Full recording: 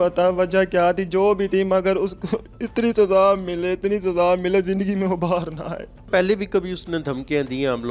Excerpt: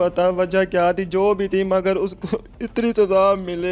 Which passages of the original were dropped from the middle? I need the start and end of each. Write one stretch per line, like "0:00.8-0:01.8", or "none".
none